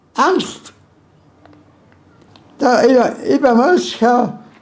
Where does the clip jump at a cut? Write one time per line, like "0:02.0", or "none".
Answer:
0:02.3